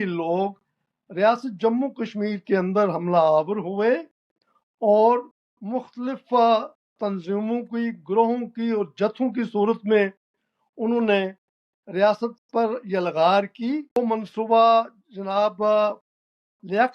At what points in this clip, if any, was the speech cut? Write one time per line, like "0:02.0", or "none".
0:14.0